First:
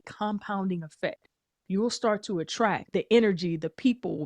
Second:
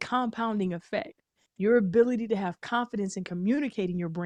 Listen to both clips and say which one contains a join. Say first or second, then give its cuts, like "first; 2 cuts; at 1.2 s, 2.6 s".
first; 1 cut; at 2.8 s